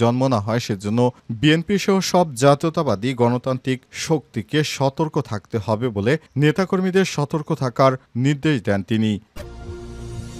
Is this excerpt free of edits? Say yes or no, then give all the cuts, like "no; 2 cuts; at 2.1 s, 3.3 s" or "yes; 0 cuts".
no; 1 cut; at 9.3 s